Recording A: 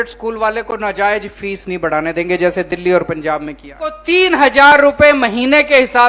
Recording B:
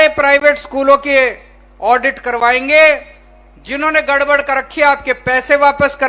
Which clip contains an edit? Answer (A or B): A